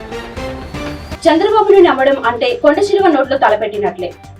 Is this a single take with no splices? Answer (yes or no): no